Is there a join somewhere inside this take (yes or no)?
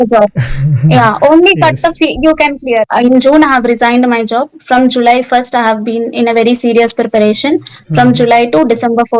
yes